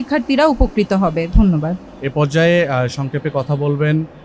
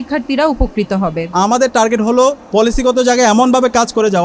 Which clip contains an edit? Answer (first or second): second